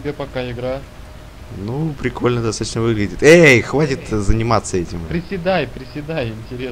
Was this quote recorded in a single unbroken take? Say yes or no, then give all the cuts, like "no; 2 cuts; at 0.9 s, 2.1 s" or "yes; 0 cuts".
yes; 0 cuts